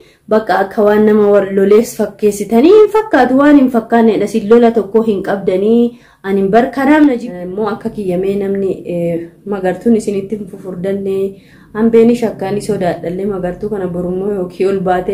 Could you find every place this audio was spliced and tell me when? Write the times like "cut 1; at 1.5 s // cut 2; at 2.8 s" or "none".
cut 1; at 7.4 s